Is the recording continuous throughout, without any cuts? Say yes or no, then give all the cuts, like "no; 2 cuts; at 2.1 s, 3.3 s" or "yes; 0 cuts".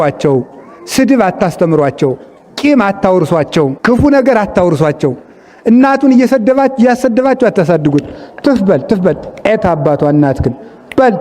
no; 1 cut; at 3.8 s